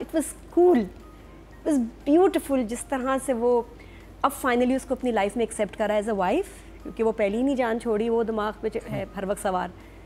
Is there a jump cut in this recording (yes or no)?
no